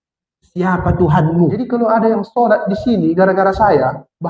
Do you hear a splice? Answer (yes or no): yes